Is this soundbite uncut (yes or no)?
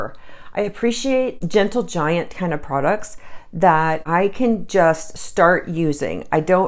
no